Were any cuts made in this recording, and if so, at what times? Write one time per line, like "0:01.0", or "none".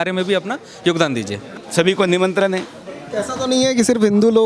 0:01.6